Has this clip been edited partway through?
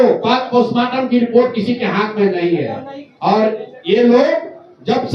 no; 0 cuts

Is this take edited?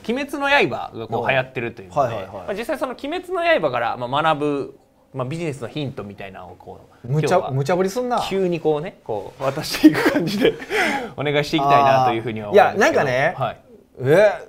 no; 0 cuts

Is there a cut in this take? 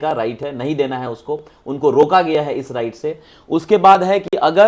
no; 0 cuts

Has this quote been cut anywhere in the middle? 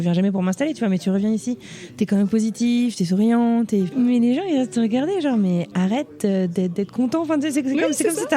yes; 1 cut; at 3.9 s

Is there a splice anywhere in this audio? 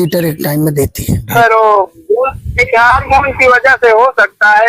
yes; 1 cut; at 1.3 s

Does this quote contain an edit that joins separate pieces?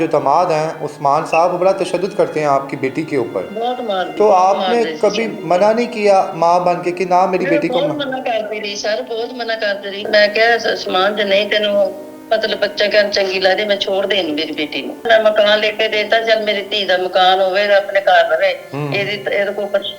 yes; 3 cuts; at 4.1 s, 10.1 s, 15.1 s

